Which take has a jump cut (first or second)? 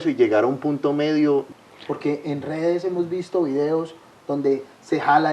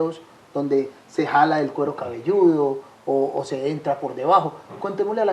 first